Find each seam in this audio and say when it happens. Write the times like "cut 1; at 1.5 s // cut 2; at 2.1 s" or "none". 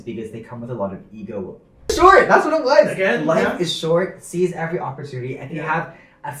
cut 1; at 1.9 s